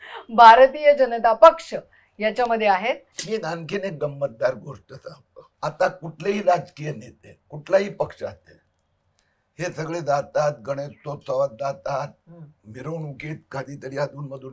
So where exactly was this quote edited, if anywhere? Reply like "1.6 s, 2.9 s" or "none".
3.1 s